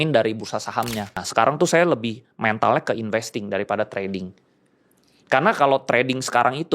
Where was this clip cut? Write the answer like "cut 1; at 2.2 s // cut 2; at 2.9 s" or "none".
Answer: cut 1; at 1.2 s